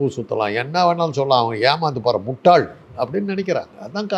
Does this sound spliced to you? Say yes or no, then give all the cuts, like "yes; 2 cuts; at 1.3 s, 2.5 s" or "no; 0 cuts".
no; 0 cuts